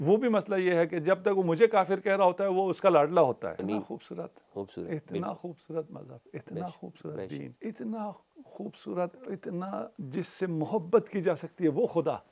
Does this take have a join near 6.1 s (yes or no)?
no